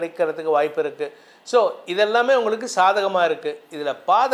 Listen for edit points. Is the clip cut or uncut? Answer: uncut